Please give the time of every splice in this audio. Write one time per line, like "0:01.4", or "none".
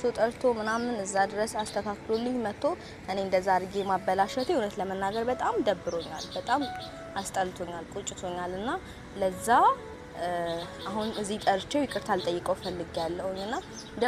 none